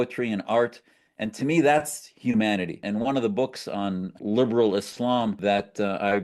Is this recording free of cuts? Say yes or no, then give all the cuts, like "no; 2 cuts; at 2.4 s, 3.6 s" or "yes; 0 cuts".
no; 3 cuts; at 2.8 s, 4.1 s, 5.4 s